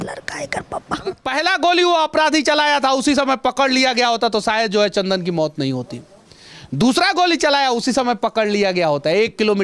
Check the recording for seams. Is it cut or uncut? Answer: cut